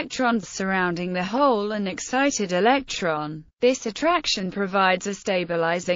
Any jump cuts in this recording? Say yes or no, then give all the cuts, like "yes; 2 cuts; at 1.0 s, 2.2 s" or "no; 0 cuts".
no; 0 cuts